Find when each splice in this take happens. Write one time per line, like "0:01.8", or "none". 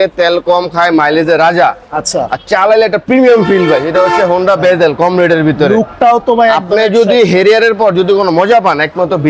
none